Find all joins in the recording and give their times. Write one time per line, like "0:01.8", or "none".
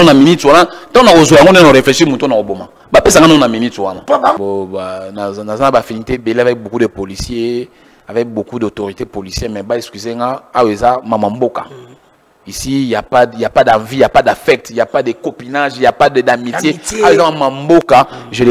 0:04.4